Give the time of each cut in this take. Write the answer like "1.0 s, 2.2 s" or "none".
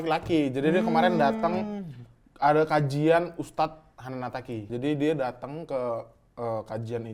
4.6 s

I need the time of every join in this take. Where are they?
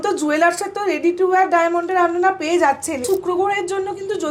3.0 s

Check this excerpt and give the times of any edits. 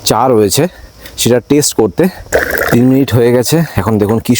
2.2 s

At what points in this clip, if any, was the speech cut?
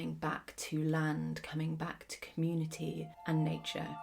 3.1 s

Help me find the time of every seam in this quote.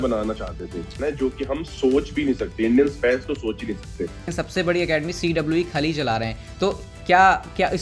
0.9 s, 4.3 s

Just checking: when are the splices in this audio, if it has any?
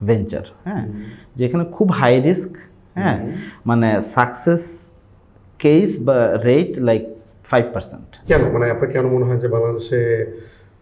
8.1 s

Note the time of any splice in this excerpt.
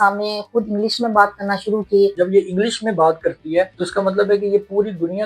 2.1 s, 3.8 s

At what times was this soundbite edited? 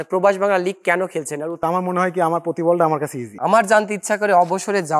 1.6 s, 3.3 s

